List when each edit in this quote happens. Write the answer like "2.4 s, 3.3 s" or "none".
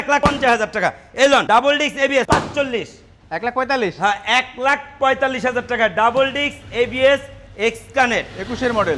none